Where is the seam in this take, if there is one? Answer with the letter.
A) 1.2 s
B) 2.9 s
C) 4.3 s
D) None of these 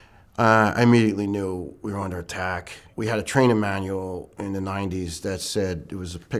B